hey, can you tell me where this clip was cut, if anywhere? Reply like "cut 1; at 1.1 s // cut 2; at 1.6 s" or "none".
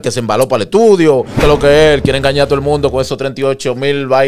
cut 1; at 1.4 s